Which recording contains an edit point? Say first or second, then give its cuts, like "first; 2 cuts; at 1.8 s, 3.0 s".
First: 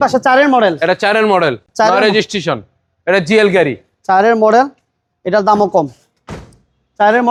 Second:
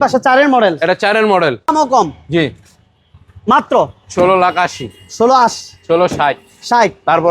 second; 1 cut; at 1.7 s